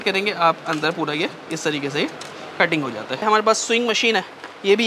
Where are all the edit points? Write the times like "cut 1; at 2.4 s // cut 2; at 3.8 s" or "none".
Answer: cut 1; at 3.2 s